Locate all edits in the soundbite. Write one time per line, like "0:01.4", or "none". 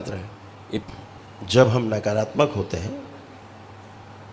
0:00.8
0:03.4